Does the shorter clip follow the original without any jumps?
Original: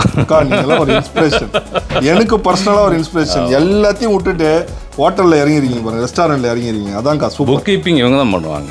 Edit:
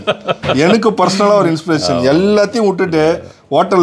yes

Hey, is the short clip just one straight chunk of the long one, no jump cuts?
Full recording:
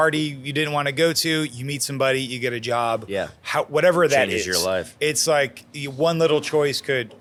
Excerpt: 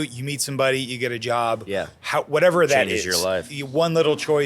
no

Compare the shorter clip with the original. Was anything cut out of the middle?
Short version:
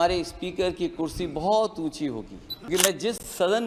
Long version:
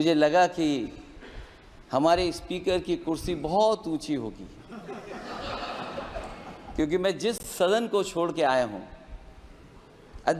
yes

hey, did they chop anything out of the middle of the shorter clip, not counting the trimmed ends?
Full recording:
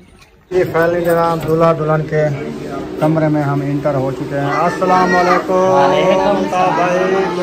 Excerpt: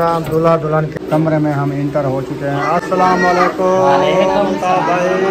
yes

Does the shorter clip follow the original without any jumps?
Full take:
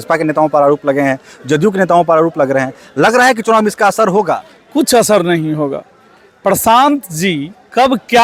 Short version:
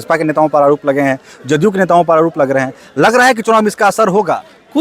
yes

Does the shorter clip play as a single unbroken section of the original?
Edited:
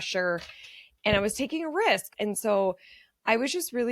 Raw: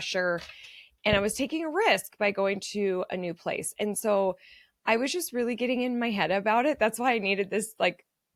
no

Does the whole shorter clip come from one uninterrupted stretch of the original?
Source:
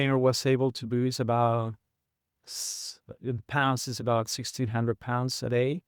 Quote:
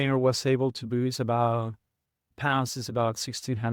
no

